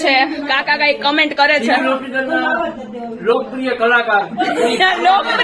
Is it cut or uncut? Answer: uncut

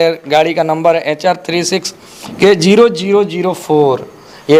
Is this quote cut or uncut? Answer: uncut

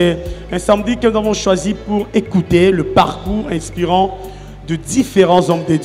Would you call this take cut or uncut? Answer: uncut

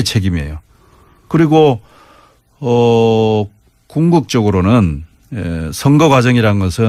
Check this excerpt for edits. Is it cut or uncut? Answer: uncut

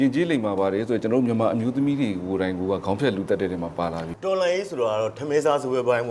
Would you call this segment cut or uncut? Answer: cut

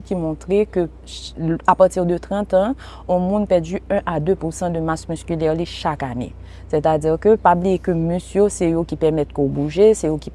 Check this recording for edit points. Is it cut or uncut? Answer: uncut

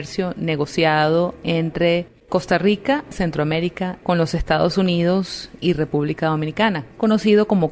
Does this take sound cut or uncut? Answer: uncut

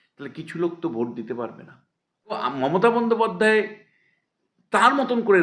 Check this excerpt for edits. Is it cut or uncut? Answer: cut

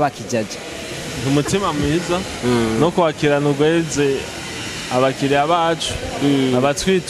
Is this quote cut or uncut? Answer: uncut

